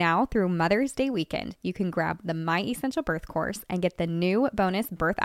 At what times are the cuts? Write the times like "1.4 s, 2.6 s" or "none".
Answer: none